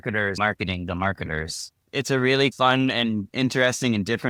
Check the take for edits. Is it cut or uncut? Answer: uncut